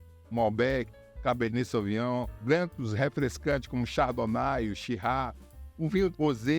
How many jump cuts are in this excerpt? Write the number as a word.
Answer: one